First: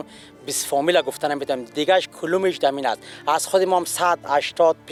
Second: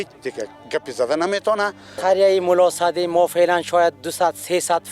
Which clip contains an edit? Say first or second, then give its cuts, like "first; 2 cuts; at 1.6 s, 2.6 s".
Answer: second; 1 cut; at 1.9 s